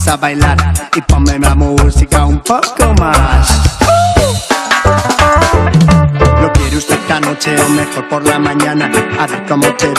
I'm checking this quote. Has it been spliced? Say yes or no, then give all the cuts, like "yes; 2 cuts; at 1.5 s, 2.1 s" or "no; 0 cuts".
no; 0 cuts